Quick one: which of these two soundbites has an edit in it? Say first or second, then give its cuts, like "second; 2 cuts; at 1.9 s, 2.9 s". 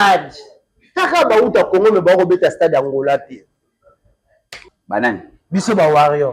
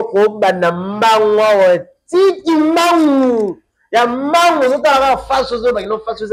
first; 1 cut; at 4.7 s